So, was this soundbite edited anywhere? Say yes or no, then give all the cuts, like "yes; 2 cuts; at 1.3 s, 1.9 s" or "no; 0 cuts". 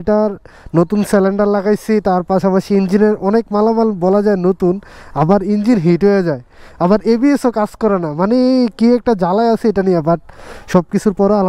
no; 0 cuts